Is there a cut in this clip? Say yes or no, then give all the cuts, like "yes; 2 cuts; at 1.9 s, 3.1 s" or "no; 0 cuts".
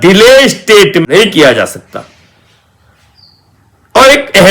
yes; 1 cut; at 1.0 s